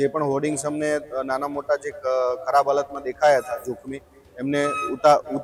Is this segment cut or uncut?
uncut